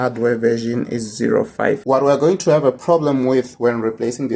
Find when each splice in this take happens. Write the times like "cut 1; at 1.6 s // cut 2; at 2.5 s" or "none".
cut 1; at 1.8 s